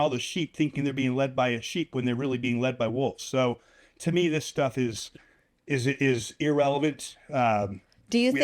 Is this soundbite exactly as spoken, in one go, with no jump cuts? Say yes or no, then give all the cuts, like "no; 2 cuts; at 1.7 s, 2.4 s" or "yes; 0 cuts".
yes; 0 cuts